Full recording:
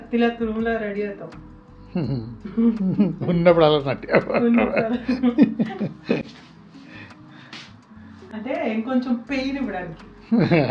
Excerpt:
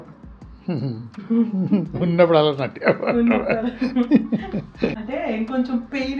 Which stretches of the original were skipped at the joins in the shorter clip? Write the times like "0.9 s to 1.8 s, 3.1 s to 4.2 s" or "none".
6.3 s to 8.4 s